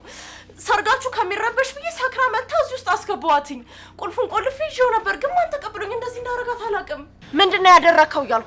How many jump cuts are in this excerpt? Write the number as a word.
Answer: one